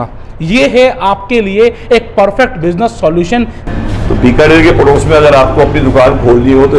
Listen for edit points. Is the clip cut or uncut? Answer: cut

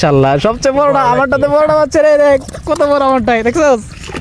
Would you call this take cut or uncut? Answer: uncut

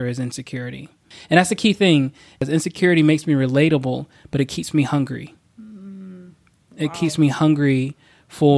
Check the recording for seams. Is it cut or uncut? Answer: cut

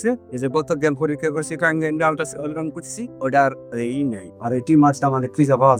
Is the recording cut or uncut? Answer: uncut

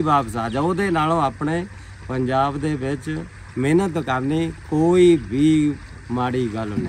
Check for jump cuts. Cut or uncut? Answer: uncut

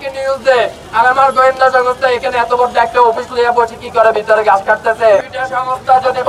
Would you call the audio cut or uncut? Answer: cut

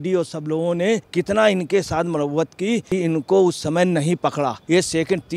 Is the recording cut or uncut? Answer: cut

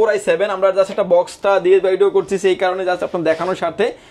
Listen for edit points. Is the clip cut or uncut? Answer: uncut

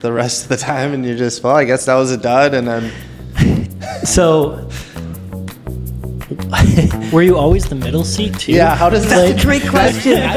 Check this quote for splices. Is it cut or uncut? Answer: uncut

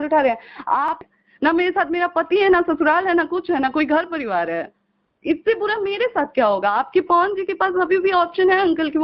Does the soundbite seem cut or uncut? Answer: cut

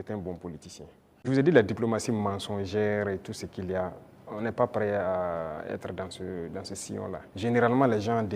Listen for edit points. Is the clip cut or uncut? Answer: cut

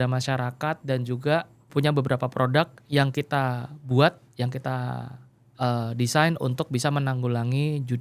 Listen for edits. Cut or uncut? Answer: uncut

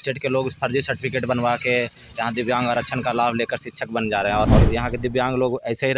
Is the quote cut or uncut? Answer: cut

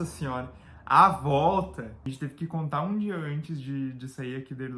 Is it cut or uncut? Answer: cut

